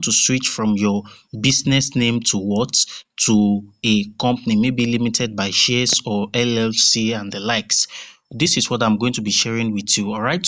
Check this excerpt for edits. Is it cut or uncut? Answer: uncut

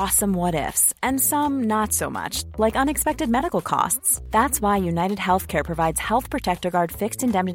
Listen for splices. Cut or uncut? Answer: uncut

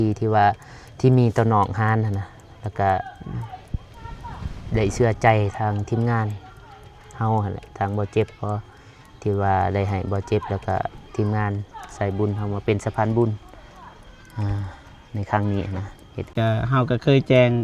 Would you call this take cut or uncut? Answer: cut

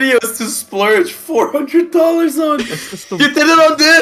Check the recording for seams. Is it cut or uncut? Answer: uncut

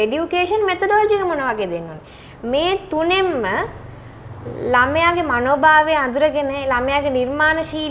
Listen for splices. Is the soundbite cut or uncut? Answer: uncut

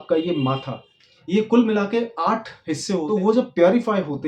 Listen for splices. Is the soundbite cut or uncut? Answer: cut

